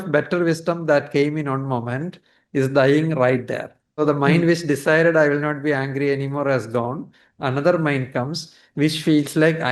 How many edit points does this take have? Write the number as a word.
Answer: one